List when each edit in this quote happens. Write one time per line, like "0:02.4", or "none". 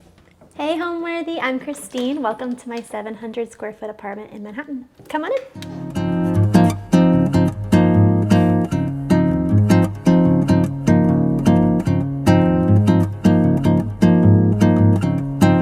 none